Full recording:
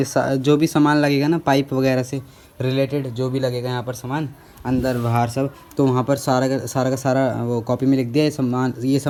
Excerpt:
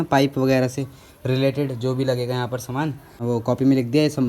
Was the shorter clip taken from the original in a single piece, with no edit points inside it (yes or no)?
no